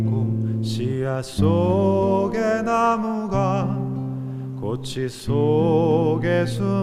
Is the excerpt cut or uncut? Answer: uncut